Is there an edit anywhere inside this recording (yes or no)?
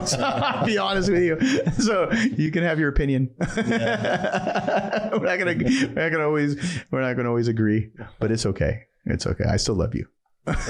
no